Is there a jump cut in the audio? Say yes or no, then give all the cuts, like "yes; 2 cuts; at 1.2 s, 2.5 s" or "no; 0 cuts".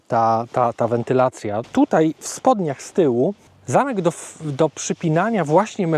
yes; 2 cuts; at 1.6 s, 3.5 s